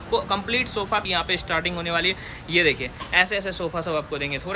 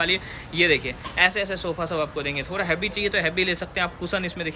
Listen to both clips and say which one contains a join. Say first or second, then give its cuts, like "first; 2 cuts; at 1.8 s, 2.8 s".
first; 1 cut; at 1.0 s